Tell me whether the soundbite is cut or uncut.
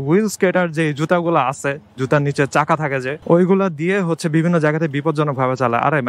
cut